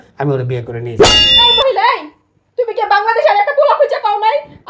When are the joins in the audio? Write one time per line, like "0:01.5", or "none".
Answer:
0:01.1